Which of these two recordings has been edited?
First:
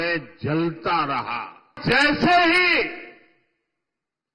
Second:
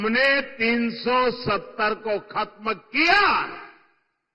first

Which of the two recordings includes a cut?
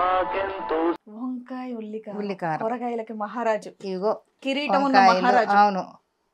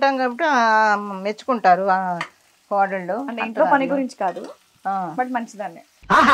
first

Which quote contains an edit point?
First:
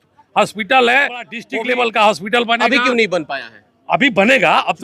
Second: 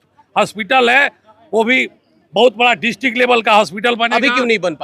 first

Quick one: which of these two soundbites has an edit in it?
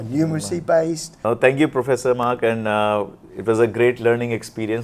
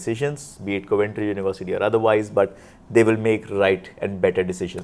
first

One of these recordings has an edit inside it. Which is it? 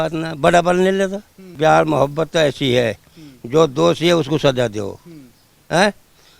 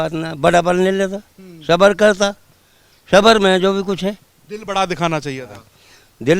first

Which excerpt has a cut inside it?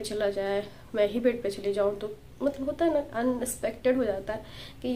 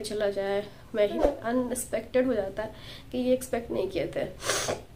second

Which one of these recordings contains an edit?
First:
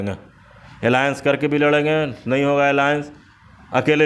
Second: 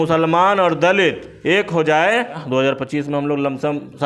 second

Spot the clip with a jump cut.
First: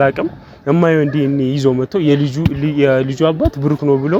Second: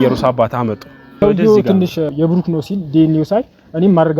second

